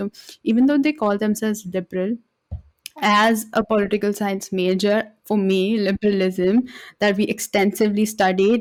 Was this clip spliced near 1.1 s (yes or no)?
no